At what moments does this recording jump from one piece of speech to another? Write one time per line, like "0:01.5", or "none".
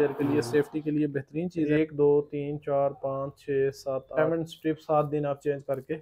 0:01.6
0:04.2